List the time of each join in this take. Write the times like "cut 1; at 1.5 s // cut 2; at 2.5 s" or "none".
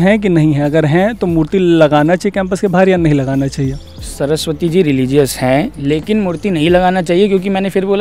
none